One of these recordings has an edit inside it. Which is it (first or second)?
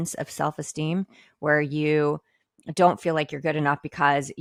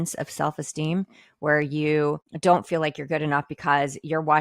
second